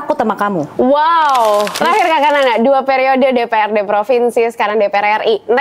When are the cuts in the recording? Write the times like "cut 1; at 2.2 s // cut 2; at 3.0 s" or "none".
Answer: cut 1; at 1.8 s